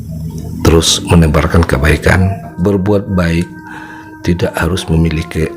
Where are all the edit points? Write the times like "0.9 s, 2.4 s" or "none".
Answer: 2.5 s